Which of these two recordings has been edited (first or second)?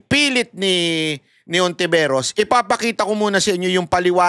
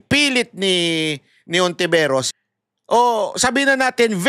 second